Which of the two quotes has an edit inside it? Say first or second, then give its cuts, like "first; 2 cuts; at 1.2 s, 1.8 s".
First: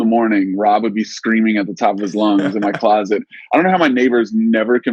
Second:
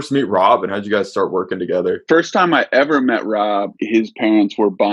second; 2 cuts; at 2.0 s, 3.8 s